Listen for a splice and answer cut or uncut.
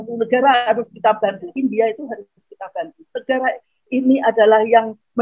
cut